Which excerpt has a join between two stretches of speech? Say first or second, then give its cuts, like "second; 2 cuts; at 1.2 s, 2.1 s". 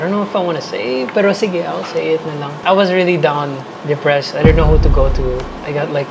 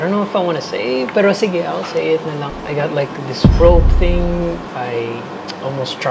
second; 2 cuts; at 2.5 s, 4.6 s